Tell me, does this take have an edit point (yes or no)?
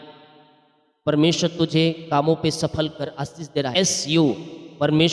yes